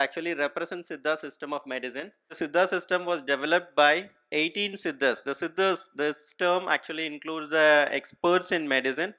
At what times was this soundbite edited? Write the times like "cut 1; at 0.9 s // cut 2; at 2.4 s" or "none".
cut 1; at 2.3 s